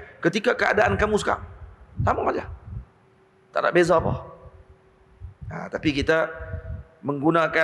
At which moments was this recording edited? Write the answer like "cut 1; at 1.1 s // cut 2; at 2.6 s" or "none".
none